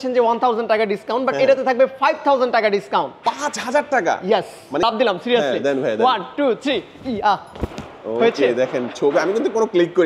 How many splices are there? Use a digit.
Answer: 1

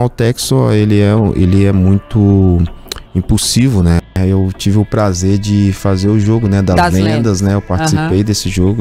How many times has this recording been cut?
1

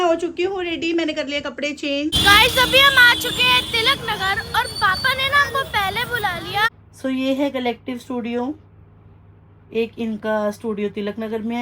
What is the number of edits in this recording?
2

